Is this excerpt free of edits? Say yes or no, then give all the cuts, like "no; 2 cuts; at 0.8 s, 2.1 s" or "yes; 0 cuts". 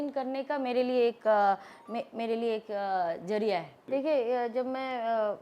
no; 1 cut; at 3.8 s